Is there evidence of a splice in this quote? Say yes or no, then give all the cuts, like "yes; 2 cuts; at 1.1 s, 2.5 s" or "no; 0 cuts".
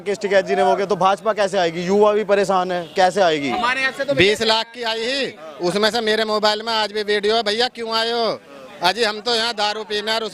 no; 0 cuts